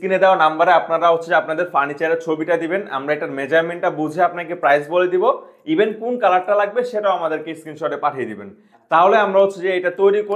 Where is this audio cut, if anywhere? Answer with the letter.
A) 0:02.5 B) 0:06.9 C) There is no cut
C